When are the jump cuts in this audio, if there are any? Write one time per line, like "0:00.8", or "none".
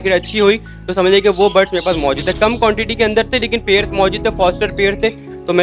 none

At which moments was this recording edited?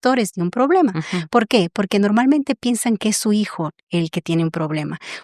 none

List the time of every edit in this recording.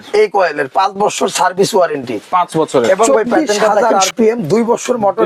0:03.8

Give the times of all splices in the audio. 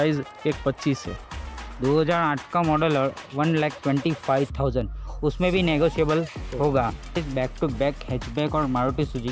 none

